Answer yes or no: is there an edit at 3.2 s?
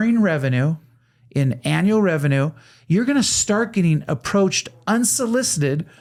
no